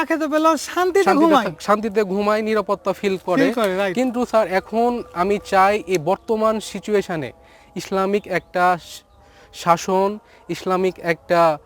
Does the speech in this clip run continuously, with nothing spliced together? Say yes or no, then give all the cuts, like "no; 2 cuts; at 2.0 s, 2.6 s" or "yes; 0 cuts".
yes; 0 cuts